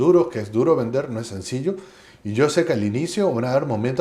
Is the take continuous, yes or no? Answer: yes